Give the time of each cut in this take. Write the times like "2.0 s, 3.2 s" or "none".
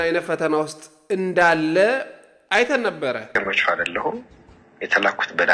3.4 s